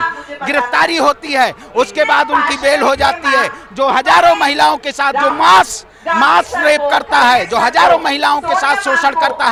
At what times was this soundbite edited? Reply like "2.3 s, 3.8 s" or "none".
none